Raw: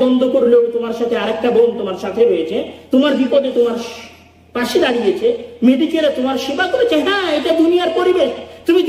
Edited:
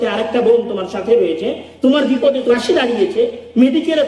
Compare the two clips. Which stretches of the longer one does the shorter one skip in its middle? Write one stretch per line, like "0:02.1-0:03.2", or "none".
0:03.6-0:04.6